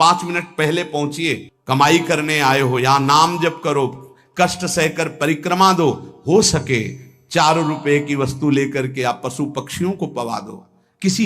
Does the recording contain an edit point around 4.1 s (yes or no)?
no